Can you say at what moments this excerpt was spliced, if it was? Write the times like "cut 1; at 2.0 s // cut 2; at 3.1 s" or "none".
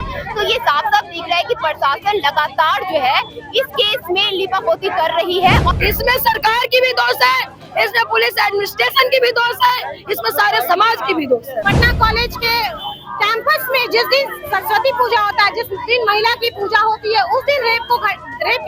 cut 1; at 5.8 s // cut 2; at 11.6 s